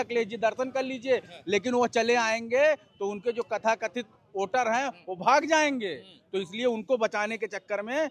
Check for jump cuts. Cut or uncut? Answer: uncut